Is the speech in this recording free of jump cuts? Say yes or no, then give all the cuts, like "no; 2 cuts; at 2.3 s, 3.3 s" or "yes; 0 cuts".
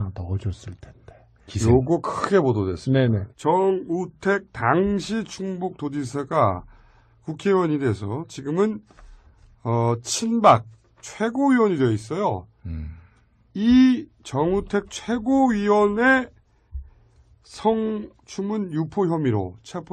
no; 1 cut; at 18.4 s